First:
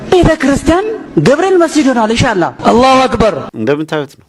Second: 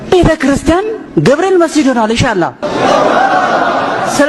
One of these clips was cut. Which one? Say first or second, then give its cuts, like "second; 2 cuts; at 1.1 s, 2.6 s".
first; 2 cuts; at 2.5 s, 3.5 s